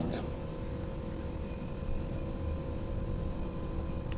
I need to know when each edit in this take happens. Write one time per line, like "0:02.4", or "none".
none